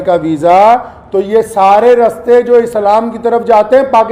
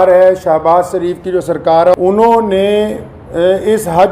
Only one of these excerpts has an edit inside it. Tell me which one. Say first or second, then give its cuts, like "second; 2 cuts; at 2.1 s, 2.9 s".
second; 1 cut; at 1.9 s